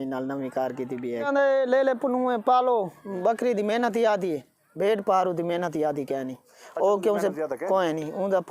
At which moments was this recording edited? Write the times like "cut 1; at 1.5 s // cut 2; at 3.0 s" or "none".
cut 1; at 1.3 s